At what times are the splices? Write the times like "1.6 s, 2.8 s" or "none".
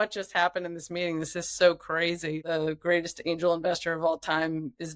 2.5 s

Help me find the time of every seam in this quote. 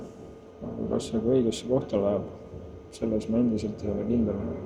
none

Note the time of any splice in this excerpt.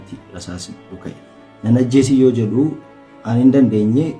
none

